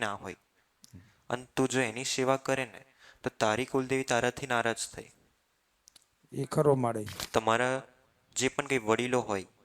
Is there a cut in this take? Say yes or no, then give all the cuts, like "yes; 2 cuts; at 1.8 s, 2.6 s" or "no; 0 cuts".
yes; 1 cut; at 7.2 s